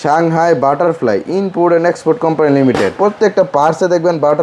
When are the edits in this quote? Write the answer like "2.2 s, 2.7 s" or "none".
2.9 s